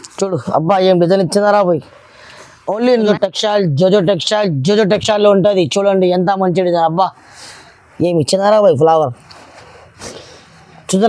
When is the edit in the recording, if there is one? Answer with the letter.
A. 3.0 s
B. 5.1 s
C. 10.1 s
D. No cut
A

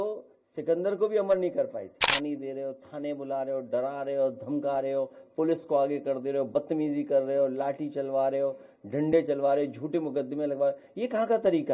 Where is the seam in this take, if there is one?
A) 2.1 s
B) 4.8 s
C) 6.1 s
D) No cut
A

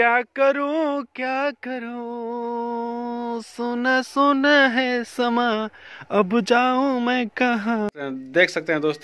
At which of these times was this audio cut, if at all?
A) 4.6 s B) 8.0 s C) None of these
B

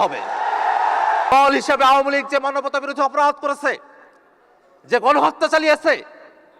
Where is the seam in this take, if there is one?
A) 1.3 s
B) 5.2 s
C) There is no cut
A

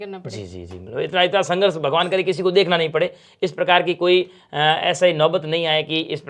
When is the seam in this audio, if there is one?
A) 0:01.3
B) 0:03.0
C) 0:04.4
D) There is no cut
D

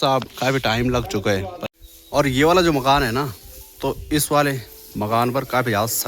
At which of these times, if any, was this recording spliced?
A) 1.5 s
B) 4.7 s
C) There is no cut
A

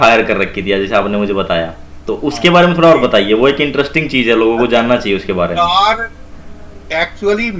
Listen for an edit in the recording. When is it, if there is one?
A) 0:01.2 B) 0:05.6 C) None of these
C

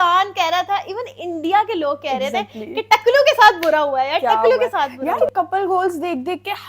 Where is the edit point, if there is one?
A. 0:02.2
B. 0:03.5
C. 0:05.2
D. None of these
C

